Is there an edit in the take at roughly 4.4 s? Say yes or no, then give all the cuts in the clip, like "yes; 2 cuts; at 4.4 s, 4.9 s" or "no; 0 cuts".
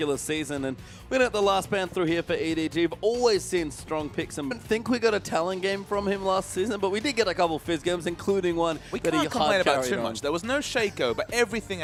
no; 0 cuts